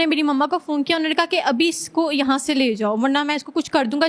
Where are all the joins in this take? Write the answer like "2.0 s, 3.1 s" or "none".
none